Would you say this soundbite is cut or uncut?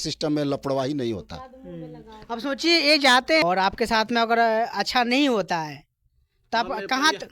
cut